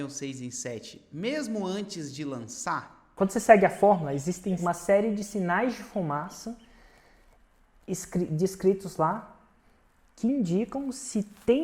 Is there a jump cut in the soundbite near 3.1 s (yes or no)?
yes